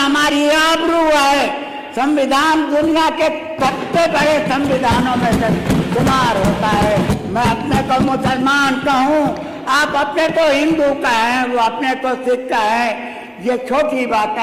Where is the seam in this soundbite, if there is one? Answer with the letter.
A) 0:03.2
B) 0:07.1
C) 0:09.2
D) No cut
B